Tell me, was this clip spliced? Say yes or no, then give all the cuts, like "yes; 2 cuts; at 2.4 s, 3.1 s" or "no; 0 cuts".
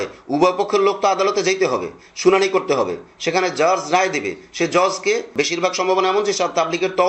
yes; 1 cut; at 5.3 s